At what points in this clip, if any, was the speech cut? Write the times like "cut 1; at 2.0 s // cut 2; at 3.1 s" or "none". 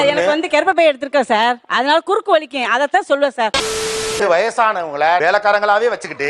cut 1; at 4.0 s